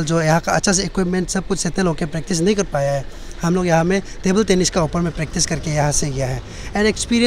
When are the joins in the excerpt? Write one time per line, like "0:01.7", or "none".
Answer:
none